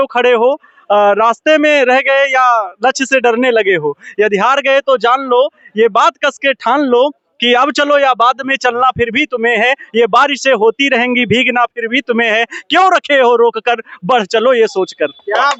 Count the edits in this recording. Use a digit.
0